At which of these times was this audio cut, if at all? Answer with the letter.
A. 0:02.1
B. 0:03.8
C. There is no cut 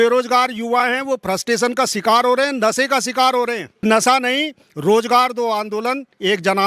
B